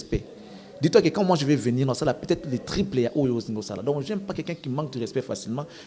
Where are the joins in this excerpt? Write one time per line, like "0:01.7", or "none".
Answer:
none